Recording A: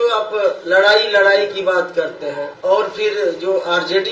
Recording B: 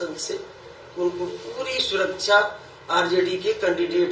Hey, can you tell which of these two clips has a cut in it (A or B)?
A